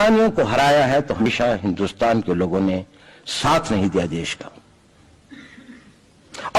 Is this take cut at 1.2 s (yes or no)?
yes